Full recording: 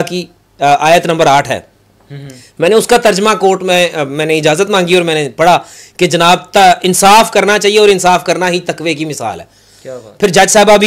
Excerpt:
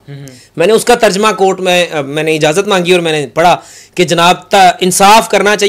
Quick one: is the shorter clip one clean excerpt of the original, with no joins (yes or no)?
yes